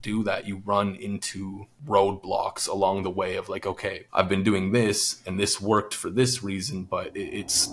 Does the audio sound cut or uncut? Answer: cut